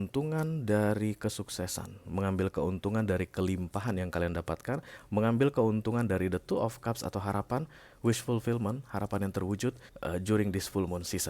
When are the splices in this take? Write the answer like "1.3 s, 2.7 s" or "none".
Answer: 9.9 s